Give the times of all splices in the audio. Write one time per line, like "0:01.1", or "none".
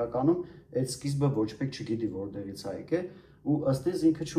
none